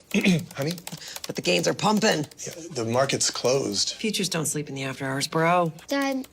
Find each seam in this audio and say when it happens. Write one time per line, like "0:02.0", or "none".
0:03.3